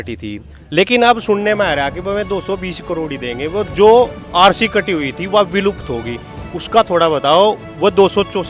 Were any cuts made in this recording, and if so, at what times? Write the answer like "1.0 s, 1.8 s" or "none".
none